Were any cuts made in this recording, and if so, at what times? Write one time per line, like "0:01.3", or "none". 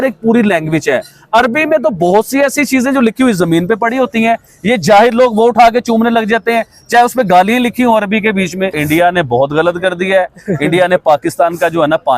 0:08.8